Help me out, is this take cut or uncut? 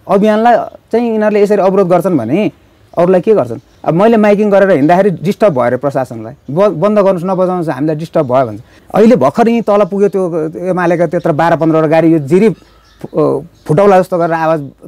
cut